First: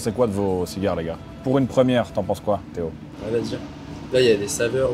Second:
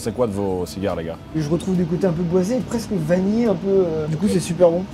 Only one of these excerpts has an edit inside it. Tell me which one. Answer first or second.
second